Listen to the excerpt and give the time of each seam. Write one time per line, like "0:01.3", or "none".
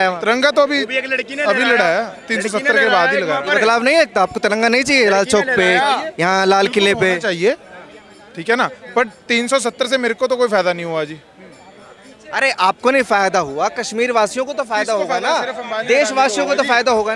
none